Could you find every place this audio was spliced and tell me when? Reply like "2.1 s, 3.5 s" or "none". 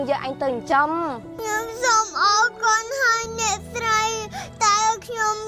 none